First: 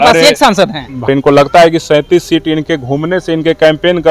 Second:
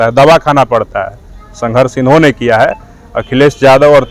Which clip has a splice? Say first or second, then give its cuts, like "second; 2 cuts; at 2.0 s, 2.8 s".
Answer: first; 1 cut; at 1.1 s